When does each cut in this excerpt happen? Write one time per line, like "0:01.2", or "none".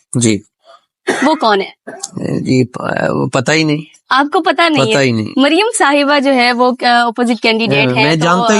none